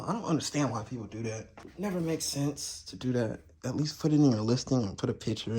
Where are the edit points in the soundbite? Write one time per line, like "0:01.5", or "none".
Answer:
0:01.6